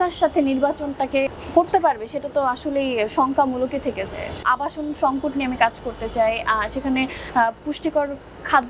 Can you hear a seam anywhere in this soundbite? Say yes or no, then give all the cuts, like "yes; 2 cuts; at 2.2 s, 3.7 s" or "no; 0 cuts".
yes; 2 cuts; at 1.3 s, 4.4 s